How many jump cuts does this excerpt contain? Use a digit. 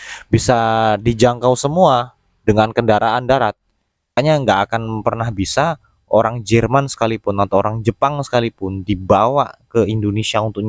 1